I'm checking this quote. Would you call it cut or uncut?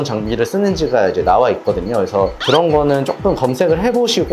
cut